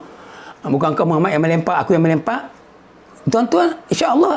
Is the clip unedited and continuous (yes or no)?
yes